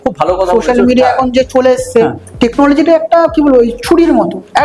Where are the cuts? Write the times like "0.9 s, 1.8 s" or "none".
2.2 s